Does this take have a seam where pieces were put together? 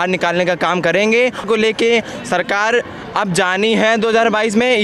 yes; 1 cut; at 1.4 s

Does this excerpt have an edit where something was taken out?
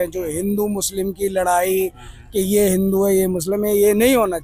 no; 0 cuts

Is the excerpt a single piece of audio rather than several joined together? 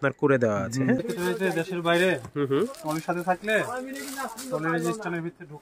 no; 1 cut; at 1.0 s

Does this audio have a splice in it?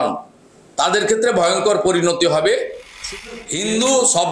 yes; 1 cut; at 3.3 s

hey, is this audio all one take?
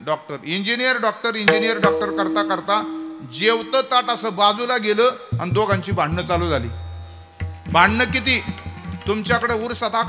yes; 0 cuts

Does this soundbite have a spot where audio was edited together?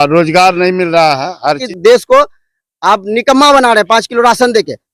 yes; 1 cut; at 1.6 s

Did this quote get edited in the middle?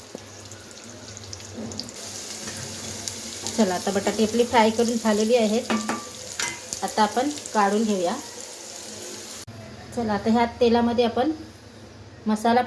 yes; 1 cut; at 9.5 s

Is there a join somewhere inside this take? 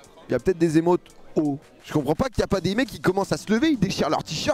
yes; 1 cut; at 1.8 s

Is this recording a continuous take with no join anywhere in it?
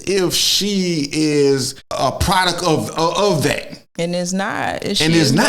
no; 1 cut; at 1.8 s

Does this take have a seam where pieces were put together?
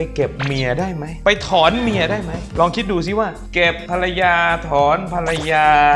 no; 0 cuts

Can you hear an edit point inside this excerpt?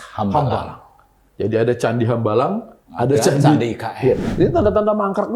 yes; 1 cut; at 4.3 s

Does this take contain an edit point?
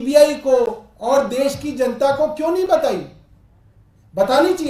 no; 0 cuts

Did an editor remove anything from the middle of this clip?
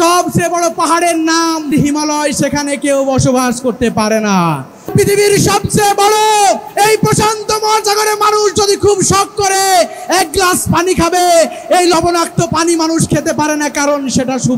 yes; 4 cuts; at 1.7 s, 4.9 s, 6.7 s, 10.7 s

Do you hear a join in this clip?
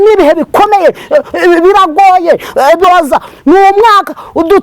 yes; 1 cut; at 2.8 s

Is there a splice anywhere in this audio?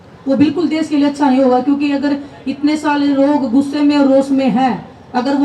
no; 0 cuts

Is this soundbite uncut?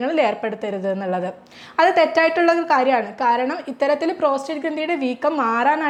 yes; 0 cuts

